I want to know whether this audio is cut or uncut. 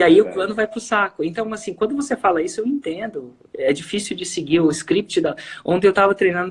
uncut